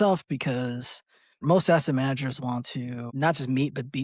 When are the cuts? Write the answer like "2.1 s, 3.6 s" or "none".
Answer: 1.4 s, 3.1 s

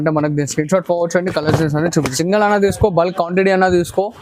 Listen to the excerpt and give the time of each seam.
2.1 s

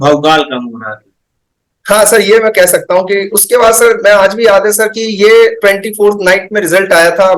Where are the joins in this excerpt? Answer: none

